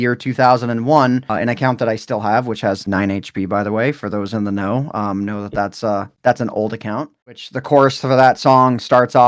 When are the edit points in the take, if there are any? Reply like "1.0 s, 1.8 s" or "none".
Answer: 7.1 s